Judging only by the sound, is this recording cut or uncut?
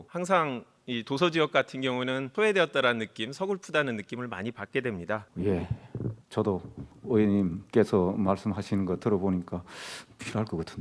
cut